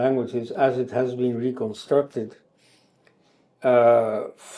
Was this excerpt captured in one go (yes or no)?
yes